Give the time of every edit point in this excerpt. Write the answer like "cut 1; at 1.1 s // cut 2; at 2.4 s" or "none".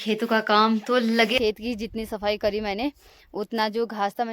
cut 1; at 1.4 s